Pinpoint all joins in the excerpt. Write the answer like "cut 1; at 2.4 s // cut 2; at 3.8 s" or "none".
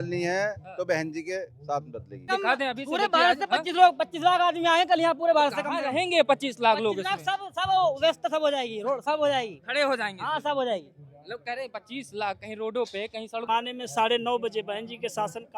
cut 1; at 2.3 s // cut 2; at 13.4 s